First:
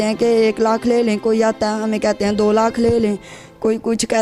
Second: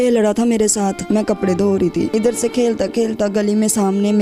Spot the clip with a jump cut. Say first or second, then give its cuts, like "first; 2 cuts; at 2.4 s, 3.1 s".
second; 2 cuts; at 1.0 s, 2.1 s